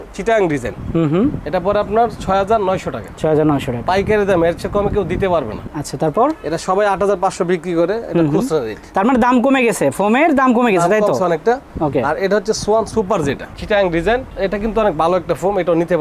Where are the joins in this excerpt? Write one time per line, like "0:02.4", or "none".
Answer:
none